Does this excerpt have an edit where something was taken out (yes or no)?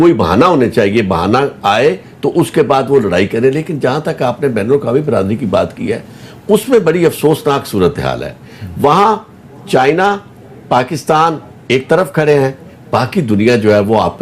no